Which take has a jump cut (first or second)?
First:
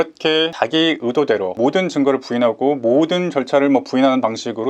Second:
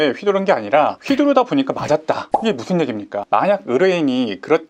second